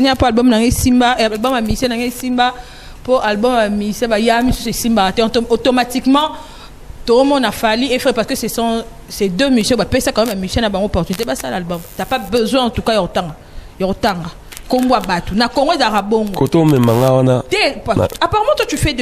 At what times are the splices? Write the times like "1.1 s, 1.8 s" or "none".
none